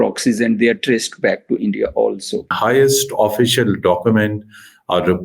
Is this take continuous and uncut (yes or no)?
no